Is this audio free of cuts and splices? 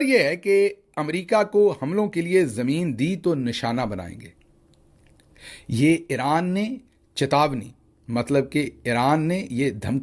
yes; 0 cuts

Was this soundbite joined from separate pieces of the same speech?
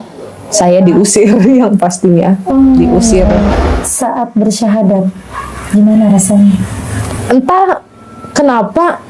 yes; 1 cut; at 3.5 s

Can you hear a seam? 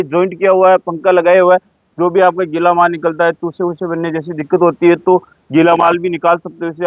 no; 0 cuts

